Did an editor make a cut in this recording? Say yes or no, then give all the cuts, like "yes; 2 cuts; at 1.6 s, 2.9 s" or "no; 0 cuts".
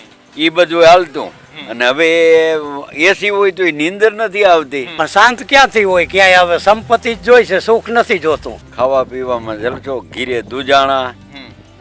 yes; 2 cuts; at 4.8 s, 8.6 s